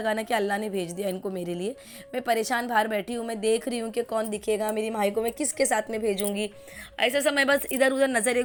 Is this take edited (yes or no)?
no